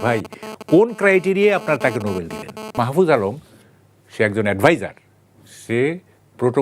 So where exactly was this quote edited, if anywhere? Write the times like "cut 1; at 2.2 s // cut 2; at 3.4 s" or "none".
cut 1; at 2.8 s